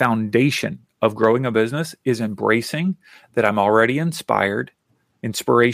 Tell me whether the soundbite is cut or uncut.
uncut